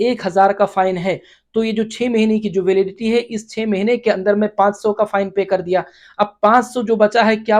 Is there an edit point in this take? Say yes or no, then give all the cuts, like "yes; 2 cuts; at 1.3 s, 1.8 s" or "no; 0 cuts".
no; 0 cuts